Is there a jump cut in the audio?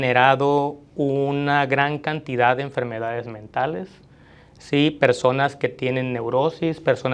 no; 0 cuts

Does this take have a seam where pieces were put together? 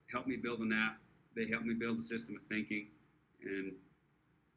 no; 0 cuts

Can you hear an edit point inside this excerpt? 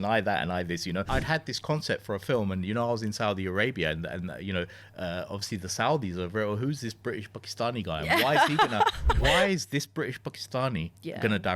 yes; 2 cuts; at 1.1 s, 9.2 s

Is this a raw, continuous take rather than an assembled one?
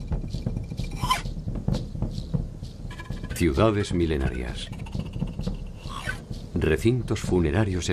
no; 1 cut; at 1.6 s

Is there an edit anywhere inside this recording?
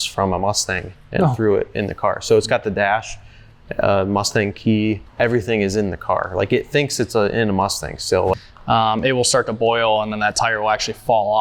yes; 2 cuts; at 5.1 s, 8.5 s

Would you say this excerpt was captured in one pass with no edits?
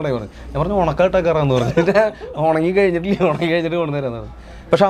yes; 0 cuts

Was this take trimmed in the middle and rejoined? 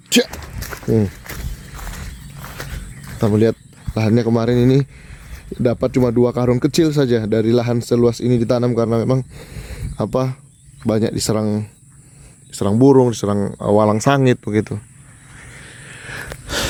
no; 0 cuts

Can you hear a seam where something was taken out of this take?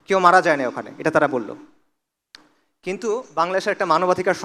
no; 0 cuts

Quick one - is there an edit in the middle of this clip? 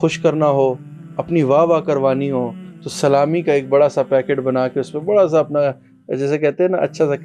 no; 0 cuts

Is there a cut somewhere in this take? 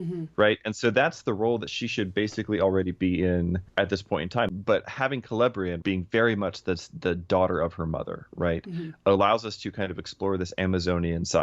yes; 3 cuts; at 3.6 s, 4.5 s, 5.8 s

